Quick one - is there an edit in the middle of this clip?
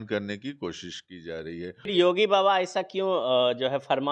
yes; 1 cut; at 1.9 s

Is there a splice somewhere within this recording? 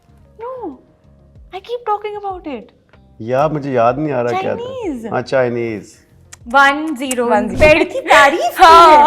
yes; 1 cut; at 7.5 s

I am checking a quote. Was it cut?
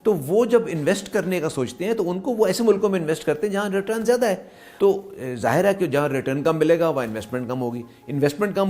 yes; 1 cut; at 4.6 s

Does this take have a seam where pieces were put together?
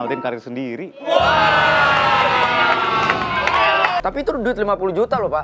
yes; 1 cut; at 4.0 s

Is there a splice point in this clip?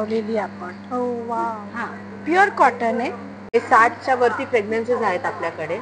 yes; 1 cut; at 3.4 s

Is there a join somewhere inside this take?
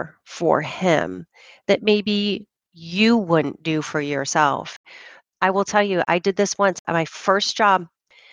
yes; 1 cut; at 4.9 s

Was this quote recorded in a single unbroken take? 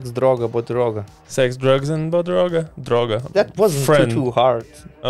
no; 2 cuts; at 1.2 s, 3.2 s

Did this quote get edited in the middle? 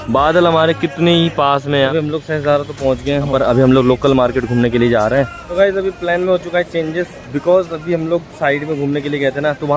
yes; 3 cuts; at 1.9 s, 3.3 s, 5.4 s

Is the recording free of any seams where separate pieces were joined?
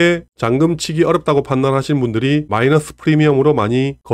yes; 0 cuts

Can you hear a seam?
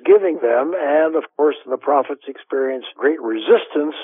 no; 0 cuts

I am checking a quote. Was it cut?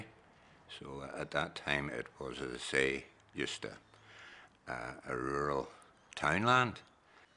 yes; 1 cut; at 5.7 s

